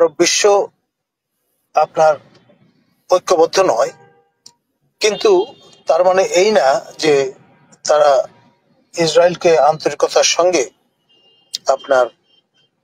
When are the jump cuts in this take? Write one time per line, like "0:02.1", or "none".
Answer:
none